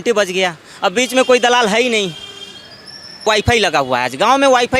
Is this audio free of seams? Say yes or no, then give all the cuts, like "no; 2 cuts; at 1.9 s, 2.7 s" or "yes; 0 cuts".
no; 1 cut; at 3.2 s